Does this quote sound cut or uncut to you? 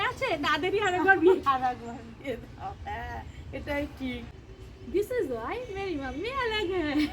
cut